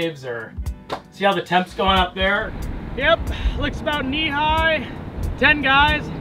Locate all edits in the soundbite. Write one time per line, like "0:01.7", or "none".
0:02.5